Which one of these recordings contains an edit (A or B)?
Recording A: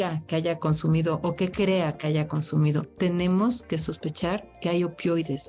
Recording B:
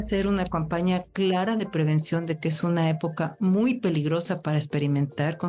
B